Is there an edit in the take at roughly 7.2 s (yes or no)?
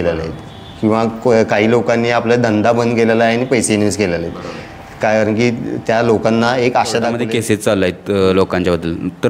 yes